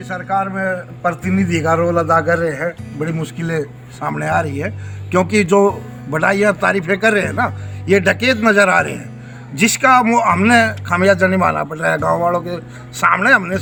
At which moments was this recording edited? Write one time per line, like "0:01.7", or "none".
none